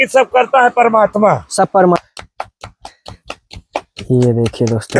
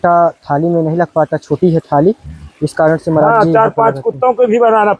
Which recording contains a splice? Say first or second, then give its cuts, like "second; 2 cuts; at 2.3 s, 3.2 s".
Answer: first; 1 cut; at 2.0 s